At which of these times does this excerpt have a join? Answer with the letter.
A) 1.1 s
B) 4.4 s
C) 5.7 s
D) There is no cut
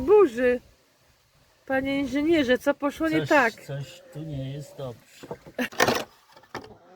C